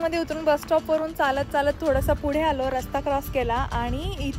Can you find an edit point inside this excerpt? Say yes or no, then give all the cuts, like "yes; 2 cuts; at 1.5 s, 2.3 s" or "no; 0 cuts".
no; 0 cuts